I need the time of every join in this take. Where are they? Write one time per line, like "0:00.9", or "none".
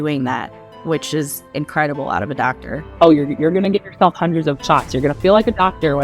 0:02.8